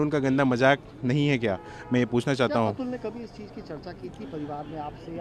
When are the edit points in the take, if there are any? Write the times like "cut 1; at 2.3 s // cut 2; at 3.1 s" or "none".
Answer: none